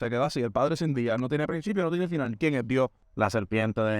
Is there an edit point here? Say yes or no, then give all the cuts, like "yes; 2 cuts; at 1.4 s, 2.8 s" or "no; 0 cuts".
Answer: yes; 1 cut; at 3.0 s